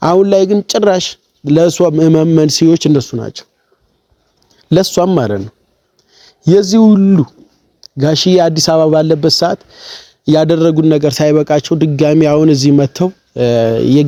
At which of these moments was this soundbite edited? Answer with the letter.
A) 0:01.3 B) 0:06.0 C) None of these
C